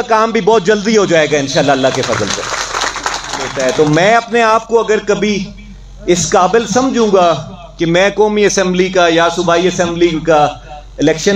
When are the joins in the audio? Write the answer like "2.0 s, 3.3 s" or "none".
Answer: 3.5 s

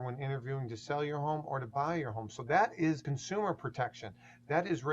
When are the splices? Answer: 3.1 s

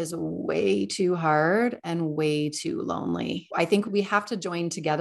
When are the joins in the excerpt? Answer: 3.8 s

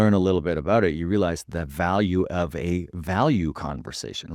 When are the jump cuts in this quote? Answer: none

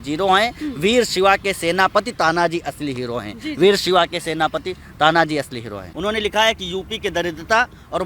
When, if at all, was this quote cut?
5.8 s

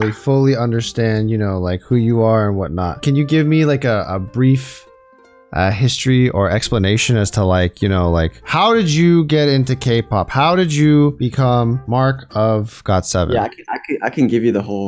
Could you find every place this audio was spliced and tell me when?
3.0 s, 11.3 s

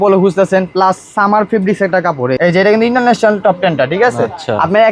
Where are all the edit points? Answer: 2.4 s

